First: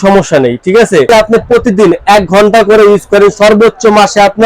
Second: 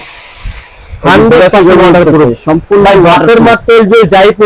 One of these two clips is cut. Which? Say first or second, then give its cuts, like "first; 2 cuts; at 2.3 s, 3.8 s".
first; 1 cut; at 1.1 s